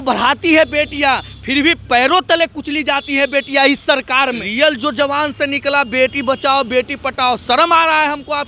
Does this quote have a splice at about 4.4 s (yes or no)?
yes